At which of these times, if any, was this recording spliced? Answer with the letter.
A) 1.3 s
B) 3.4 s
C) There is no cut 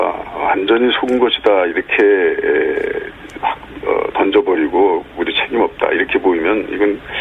B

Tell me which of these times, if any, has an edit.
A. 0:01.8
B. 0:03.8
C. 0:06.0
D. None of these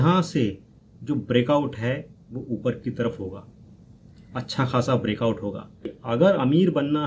C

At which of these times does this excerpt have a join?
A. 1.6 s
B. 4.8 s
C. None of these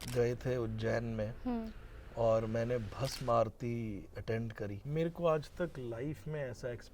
B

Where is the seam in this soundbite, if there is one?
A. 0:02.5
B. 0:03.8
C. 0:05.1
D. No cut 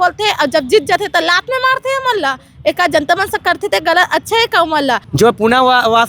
C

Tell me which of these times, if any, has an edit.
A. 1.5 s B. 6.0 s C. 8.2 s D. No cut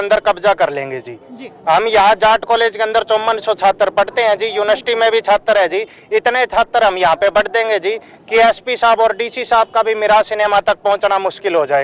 D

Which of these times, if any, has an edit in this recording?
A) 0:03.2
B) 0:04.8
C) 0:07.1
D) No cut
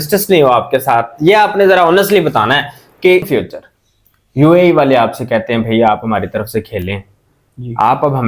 A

